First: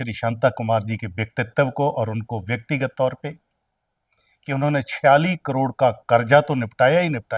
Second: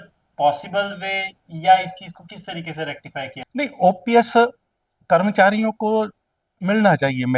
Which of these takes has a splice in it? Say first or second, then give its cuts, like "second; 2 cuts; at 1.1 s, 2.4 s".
second; 1 cut; at 3.4 s